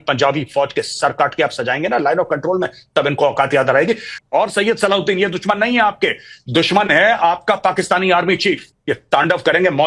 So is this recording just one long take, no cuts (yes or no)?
no